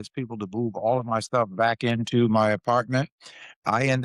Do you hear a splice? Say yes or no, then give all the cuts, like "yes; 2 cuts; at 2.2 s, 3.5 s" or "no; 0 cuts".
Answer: no; 0 cuts